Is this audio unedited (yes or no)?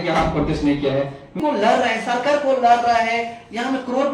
no